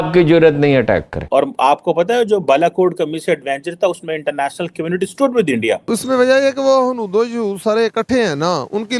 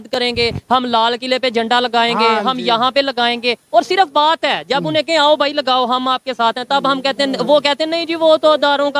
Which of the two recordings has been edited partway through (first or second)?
first